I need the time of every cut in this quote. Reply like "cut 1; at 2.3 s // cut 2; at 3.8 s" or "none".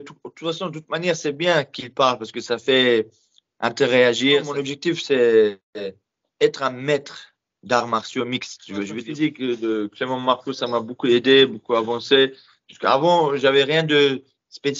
cut 1; at 4.6 s // cut 2; at 8.9 s